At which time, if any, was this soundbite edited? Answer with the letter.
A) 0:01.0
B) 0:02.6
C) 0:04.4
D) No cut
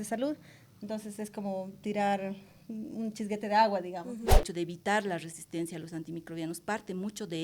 C